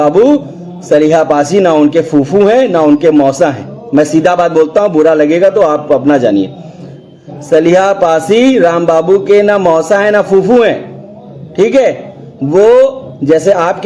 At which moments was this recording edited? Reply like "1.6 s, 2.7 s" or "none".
none